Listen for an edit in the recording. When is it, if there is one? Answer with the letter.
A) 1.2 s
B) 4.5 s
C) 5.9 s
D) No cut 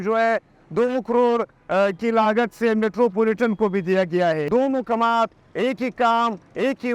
B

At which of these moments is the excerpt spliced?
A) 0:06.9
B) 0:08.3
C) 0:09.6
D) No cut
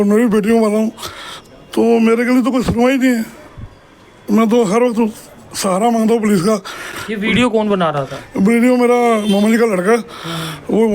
D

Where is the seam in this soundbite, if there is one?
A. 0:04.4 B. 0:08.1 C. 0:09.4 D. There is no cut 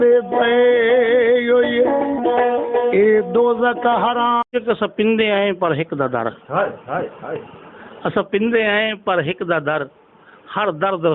A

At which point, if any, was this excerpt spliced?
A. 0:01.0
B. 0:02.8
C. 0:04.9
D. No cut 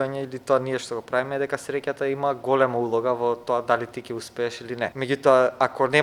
C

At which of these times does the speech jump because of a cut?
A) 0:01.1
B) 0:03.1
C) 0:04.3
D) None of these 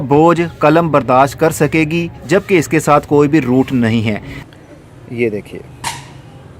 C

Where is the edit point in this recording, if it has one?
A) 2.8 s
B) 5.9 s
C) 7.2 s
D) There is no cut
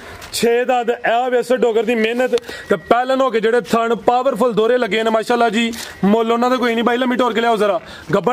D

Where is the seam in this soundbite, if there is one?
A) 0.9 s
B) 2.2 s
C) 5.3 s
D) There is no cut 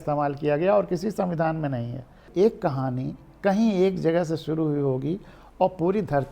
B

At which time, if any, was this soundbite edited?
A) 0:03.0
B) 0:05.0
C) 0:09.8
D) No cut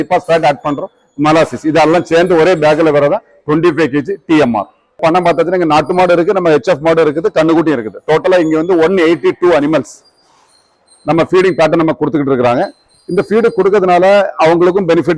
B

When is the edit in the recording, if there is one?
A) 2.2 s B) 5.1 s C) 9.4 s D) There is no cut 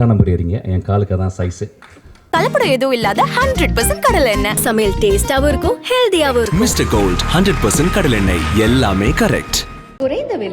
A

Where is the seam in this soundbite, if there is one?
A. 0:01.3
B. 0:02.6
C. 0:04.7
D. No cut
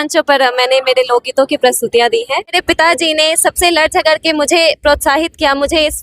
B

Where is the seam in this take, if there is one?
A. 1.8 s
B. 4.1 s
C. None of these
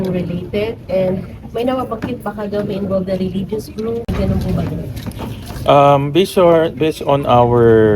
B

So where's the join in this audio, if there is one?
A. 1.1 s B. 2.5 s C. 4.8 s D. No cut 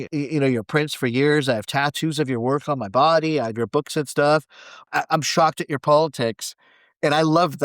C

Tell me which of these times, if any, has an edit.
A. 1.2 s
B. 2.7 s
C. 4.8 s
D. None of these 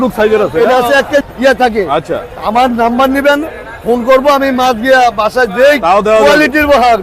A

